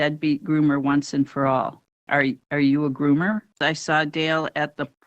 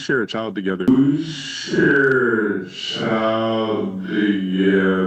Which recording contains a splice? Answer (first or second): first